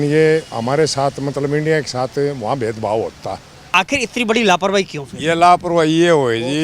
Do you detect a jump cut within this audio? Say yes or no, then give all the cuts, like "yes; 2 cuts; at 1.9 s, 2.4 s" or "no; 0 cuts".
yes; 1 cut; at 3.7 s